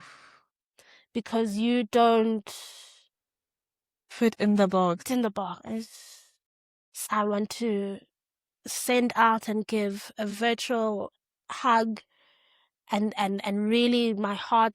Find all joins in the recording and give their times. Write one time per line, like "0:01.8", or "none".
0:05.1
0:07.0